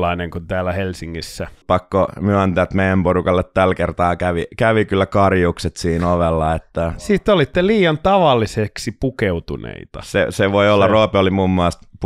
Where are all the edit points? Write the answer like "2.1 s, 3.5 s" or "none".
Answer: 1.5 s, 7.1 s